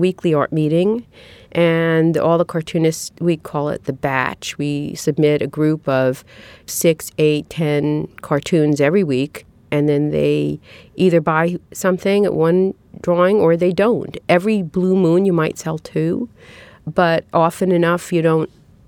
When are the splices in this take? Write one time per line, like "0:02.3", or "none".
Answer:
0:09.6